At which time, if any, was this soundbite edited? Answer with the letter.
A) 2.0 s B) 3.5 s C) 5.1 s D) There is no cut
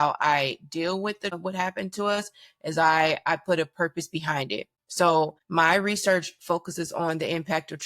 C